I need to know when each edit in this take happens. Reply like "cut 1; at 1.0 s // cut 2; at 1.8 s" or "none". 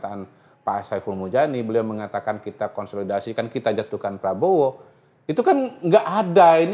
none